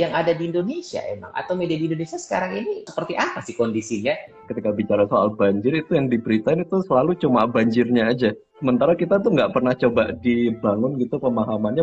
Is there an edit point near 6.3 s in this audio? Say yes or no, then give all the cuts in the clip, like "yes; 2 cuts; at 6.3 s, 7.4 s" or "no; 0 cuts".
no; 3 cuts; at 2.9 s, 4.3 s, 8.5 s